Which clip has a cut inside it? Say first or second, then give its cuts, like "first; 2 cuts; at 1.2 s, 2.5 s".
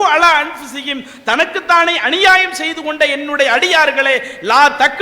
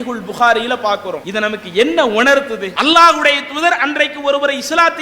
second; 2 cuts; at 1.2 s, 2.6 s